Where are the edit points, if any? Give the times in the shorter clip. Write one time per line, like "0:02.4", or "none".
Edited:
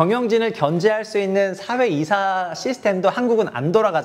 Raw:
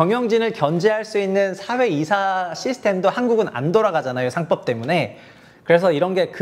none